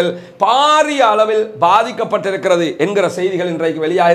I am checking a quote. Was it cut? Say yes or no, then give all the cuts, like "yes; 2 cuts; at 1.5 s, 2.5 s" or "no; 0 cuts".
no; 0 cuts